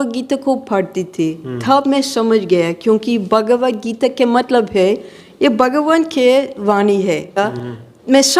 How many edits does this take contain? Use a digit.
1